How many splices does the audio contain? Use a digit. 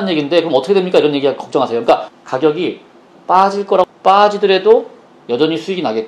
1